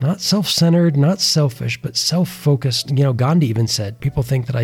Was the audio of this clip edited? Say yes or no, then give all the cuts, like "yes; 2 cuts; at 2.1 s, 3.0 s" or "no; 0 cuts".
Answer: yes; 1 cut; at 2.8 s